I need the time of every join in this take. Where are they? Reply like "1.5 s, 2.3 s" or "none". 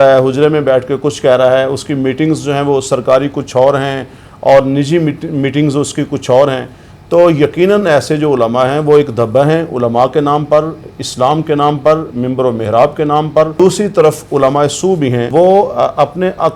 13.5 s, 15.2 s